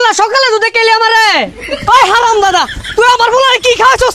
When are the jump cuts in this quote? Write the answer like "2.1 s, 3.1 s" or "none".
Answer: 1.5 s